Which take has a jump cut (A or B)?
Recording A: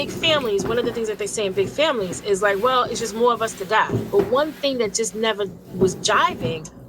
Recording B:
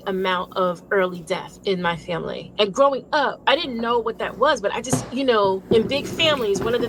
A